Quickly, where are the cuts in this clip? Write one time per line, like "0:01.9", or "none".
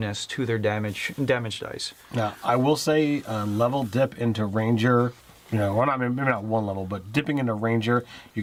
none